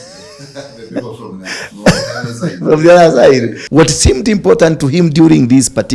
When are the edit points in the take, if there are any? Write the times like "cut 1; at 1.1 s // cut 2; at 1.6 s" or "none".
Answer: cut 1; at 3.6 s